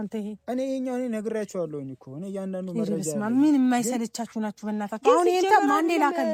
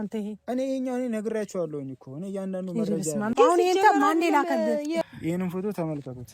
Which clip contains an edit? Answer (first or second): second